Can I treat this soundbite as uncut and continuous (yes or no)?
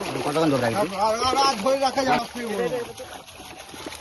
no